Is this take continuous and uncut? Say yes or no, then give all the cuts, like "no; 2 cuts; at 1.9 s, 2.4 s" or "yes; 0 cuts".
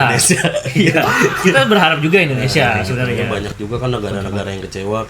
no; 1 cut; at 3.2 s